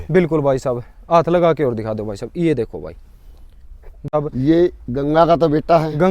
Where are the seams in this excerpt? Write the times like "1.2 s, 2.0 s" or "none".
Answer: 4.0 s